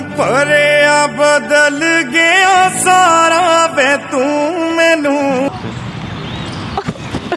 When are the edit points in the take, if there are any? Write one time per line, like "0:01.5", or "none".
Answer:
0:05.6